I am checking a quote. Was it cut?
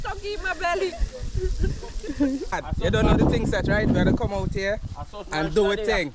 yes; 1 cut; at 2.5 s

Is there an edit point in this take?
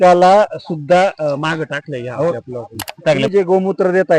yes; 1 cut; at 3.2 s

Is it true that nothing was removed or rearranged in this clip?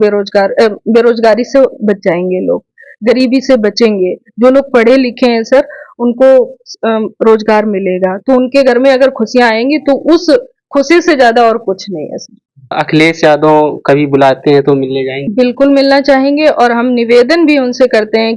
no; 2 cuts; at 12.7 s, 15.2 s

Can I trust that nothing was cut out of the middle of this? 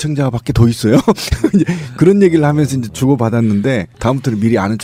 yes; 0 cuts

